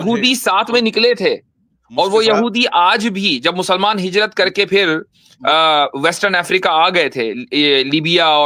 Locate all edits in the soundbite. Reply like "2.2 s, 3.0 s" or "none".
none